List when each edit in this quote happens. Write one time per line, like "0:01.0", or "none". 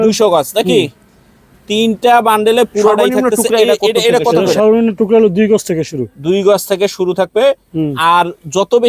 0:04.3